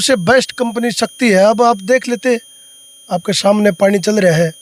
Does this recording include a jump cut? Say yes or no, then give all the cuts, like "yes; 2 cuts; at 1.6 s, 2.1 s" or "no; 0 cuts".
no; 0 cuts